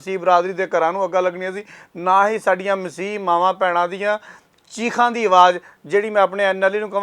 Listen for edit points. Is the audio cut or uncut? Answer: uncut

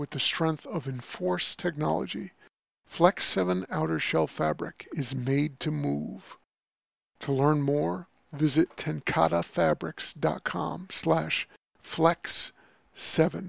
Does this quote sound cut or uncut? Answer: uncut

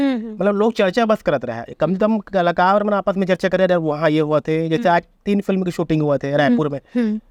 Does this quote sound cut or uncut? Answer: uncut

